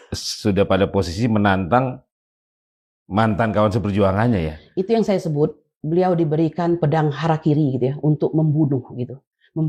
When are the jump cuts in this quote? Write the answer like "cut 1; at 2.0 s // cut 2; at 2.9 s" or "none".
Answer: none